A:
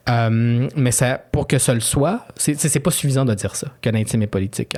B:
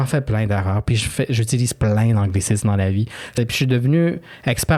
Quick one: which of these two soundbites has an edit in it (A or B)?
B